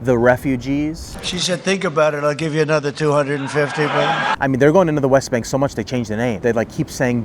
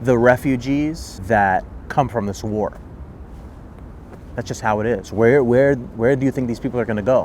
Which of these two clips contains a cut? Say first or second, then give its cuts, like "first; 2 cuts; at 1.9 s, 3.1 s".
first; 2 cuts; at 1.1 s, 4.3 s